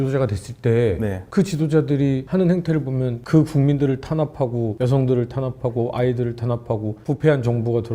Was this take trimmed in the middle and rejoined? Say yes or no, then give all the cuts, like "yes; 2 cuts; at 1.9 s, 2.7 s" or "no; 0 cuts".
no; 0 cuts